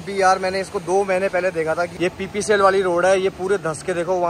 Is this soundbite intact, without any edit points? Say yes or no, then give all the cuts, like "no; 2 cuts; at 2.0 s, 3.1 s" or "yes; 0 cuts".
no; 1 cut; at 1.9 s